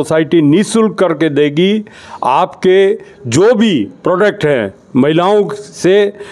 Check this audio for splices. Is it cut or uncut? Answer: uncut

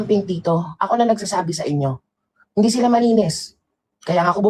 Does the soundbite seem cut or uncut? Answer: uncut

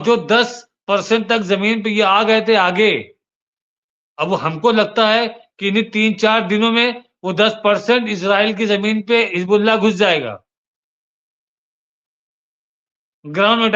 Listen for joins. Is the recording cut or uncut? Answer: uncut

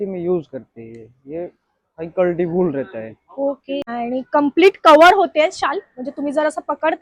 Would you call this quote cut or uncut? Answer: cut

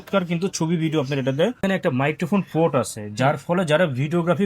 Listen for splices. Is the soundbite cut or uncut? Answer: cut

